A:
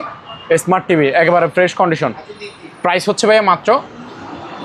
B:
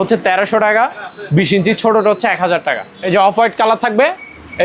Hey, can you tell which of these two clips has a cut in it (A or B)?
B